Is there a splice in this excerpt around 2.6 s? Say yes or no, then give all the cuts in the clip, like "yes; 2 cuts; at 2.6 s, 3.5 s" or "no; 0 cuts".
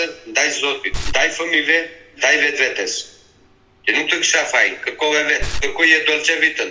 no; 2 cuts; at 1.0 s, 5.5 s